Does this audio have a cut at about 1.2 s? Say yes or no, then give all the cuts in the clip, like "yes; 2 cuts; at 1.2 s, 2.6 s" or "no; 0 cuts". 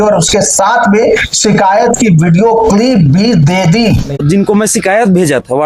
no; 1 cut; at 4.2 s